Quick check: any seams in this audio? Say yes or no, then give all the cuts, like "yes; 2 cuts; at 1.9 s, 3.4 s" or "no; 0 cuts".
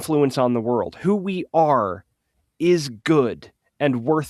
no; 0 cuts